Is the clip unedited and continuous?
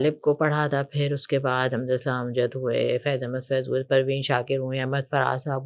yes; 0 cuts

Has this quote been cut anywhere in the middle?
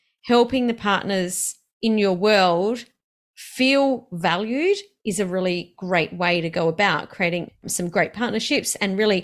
no; 0 cuts

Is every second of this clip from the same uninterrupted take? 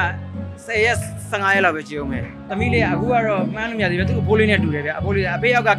no; 1 cut; at 2.4 s

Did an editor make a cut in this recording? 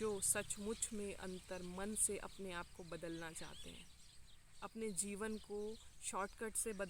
no; 0 cuts

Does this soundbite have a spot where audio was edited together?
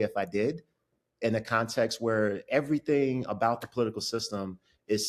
no; 0 cuts

